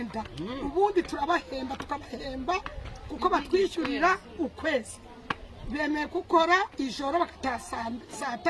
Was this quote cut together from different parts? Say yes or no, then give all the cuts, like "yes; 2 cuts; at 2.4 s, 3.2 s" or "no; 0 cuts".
no; 0 cuts